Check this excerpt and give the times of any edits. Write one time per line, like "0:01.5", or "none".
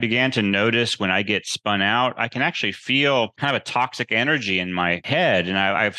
0:03.3
0:05.0